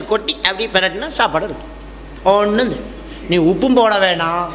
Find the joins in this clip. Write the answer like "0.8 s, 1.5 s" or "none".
none